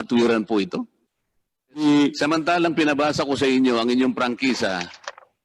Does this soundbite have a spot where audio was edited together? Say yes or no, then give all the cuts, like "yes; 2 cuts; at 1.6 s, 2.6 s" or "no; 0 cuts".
yes; 1 cut; at 1.8 s